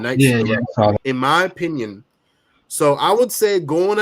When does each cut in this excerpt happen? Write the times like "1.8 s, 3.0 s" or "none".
0.9 s